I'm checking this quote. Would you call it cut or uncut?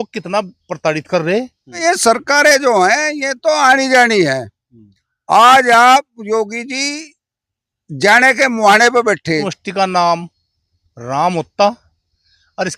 cut